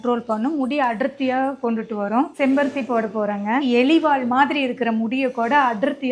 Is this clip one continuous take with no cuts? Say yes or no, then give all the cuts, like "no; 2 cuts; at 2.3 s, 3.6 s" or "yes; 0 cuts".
no; 2 cuts; at 2.3 s, 3.6 s